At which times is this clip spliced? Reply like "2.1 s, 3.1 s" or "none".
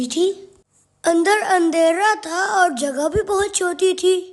none